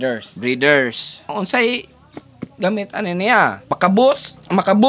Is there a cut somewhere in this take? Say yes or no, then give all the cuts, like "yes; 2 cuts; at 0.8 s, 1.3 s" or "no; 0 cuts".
yes; 2 cuts; at 1.3 s, 3.6 s